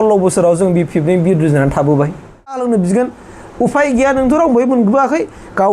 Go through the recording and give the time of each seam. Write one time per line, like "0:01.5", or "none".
0:02.6